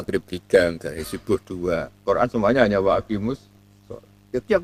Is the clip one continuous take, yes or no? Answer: yes